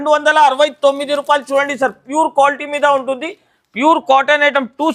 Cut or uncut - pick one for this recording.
uncut